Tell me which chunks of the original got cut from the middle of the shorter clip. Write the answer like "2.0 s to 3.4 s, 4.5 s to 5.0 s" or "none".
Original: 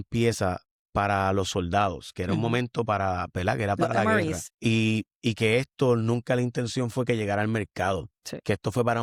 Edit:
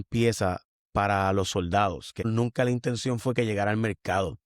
2.3 s to 6.0 s

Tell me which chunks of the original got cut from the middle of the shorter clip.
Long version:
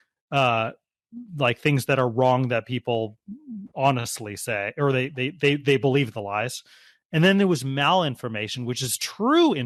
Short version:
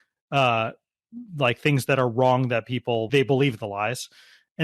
3.1 s to 5.6 s

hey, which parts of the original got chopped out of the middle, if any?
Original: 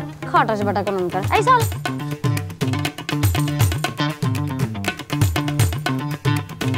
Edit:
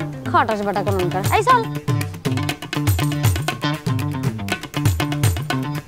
1.7 s to 2.0 s

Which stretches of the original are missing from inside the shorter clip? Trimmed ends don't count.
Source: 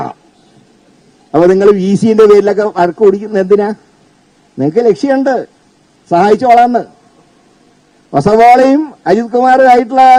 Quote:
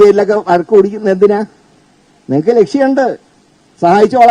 none

